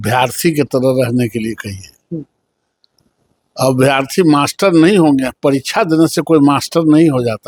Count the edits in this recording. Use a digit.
0